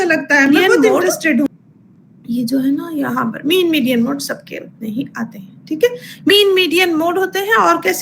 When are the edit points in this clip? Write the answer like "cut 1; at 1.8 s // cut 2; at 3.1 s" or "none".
cut 1; at 1.5 s